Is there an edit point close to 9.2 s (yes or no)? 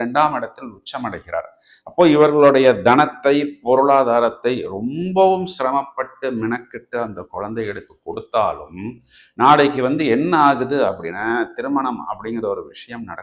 no